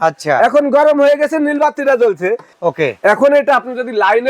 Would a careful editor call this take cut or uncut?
cut